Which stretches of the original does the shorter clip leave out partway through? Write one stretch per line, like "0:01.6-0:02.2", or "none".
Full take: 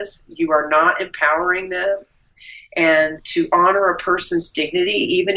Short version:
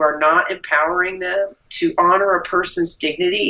0:02.2-0:03.2